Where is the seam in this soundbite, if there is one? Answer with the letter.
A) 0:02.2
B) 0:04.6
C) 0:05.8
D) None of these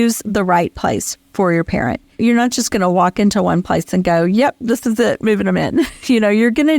A